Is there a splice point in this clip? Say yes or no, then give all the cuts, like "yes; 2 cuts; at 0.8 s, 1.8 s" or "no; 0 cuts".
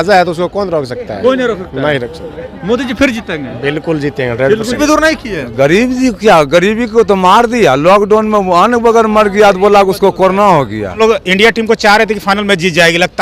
yes; 2 cuts; at 4.8 s, 11.0 s